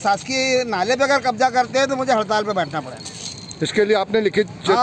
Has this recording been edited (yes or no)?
no